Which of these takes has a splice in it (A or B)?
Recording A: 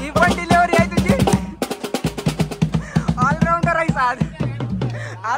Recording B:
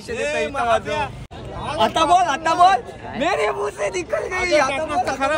B